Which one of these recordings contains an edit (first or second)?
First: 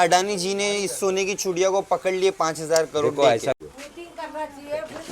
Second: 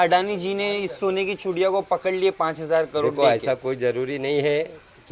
first